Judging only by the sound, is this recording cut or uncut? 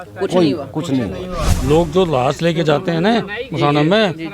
cut